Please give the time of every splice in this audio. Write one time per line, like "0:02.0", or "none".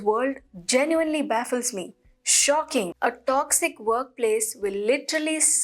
0:02.9